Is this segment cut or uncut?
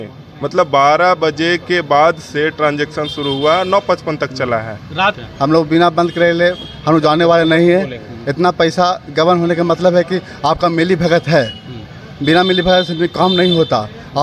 cut